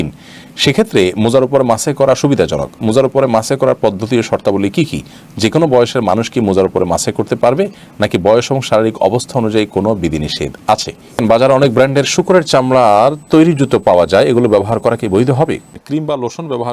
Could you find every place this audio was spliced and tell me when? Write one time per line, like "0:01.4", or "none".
0:11.2
0:15.7